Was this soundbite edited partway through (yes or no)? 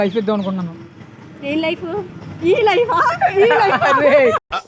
yes